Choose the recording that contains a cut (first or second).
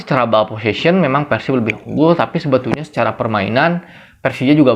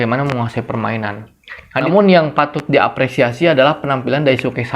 second